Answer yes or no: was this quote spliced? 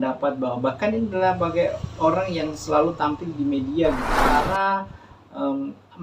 yes